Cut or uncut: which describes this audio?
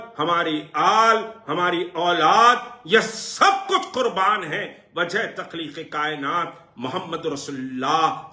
uncut